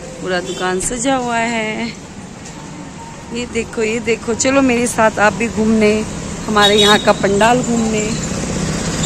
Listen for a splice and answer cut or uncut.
uncut